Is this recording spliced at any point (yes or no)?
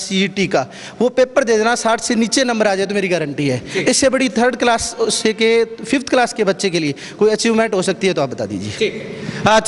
no